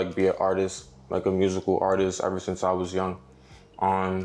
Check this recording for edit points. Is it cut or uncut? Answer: uncut